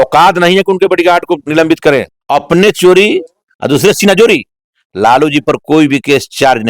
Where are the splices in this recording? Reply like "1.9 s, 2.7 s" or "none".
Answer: 2.2 s